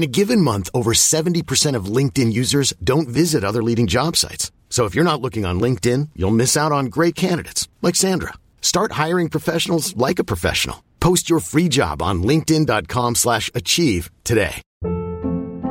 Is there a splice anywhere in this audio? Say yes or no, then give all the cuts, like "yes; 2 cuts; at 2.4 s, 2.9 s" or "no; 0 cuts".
yes; 1 cut; at 14.7 s